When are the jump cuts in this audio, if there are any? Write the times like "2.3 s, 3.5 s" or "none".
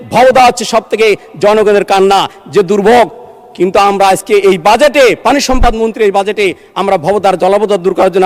none